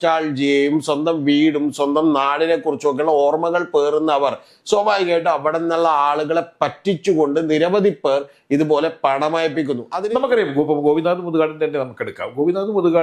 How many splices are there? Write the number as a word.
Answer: one